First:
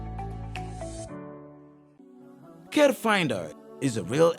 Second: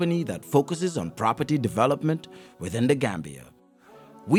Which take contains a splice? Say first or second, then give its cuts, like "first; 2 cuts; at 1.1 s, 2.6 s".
first; 1 cut; at 1.9 s